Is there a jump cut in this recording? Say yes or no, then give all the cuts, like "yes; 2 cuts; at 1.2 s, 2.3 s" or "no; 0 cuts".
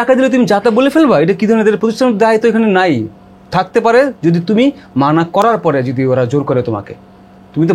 no; 0 cuts